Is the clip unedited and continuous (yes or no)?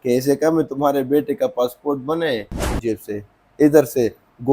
no